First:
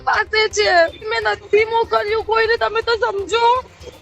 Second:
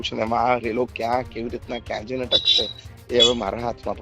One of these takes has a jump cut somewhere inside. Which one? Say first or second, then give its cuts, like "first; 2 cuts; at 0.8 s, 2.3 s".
first; 1 cut; at 1.1 s